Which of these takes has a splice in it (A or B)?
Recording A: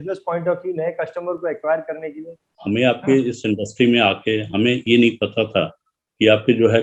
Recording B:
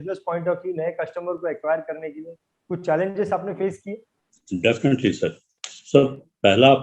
A